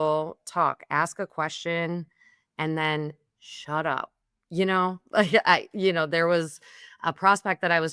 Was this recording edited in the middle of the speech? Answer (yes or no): no